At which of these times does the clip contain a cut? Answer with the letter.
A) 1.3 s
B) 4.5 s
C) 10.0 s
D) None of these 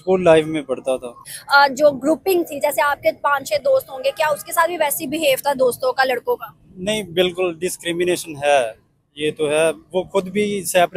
A